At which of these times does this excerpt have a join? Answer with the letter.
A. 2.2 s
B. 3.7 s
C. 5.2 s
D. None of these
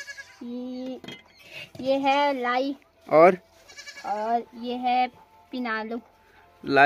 D